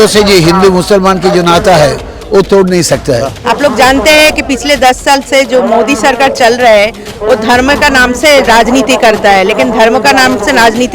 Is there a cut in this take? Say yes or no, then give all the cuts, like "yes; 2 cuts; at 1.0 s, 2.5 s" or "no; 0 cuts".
yes; 1 cut; at 3.4 s